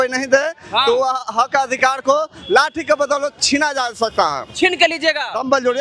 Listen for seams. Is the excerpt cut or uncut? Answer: uncut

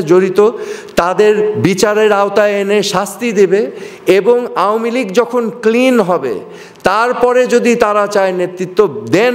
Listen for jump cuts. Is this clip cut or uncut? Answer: uncut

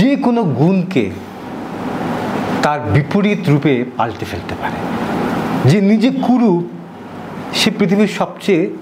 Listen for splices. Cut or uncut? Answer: uncut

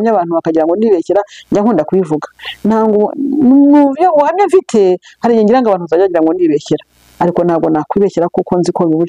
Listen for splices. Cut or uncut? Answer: uncut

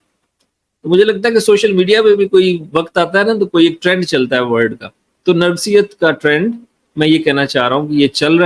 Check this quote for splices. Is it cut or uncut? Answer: uncut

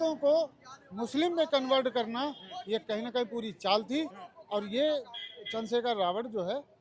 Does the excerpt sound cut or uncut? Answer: uncut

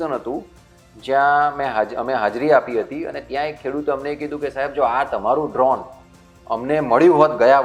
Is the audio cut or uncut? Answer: uncut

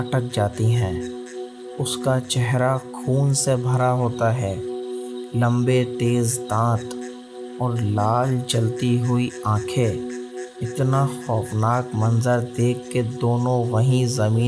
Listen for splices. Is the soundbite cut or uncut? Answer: uncut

